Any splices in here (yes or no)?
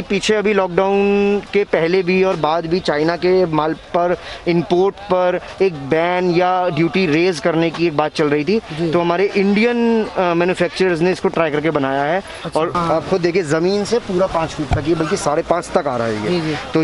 yes